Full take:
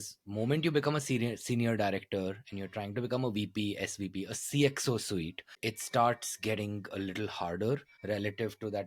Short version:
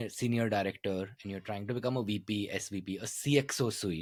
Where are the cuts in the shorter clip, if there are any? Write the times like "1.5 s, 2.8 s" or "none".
none